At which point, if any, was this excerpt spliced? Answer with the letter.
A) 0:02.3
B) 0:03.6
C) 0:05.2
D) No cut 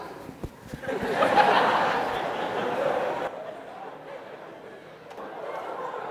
C